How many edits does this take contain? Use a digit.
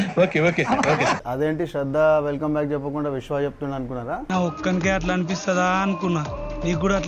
1